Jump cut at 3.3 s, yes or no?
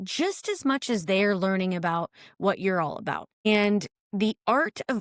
yes